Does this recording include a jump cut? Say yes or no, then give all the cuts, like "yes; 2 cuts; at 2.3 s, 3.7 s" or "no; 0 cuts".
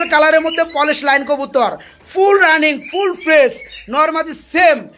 no; 0 cuts